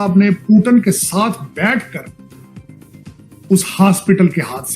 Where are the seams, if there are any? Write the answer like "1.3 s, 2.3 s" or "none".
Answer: 2.0 s, 3.5 s